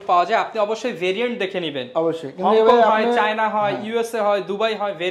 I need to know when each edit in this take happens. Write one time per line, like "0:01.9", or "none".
none